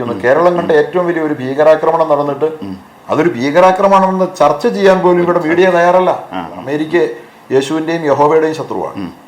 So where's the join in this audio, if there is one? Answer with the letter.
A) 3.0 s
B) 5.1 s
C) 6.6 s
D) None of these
C